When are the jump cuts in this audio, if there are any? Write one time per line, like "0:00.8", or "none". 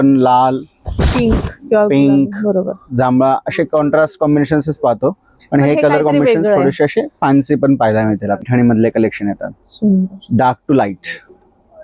0:08.5